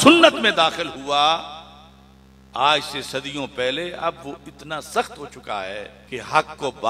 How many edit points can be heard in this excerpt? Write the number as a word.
one